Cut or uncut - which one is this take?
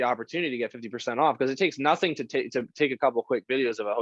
uncut